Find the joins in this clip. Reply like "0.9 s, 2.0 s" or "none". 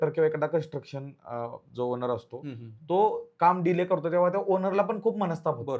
none